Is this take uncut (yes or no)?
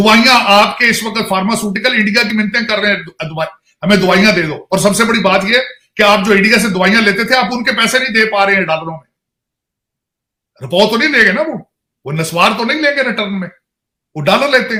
yes